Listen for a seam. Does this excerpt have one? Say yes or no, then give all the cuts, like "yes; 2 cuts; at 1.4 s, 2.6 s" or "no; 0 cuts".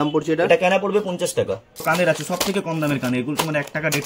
yes; 1 cut; at 1.8 s